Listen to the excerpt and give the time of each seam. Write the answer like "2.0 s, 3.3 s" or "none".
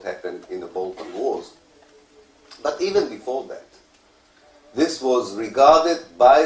4.2 s